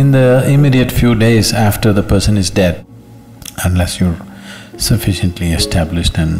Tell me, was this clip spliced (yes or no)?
yes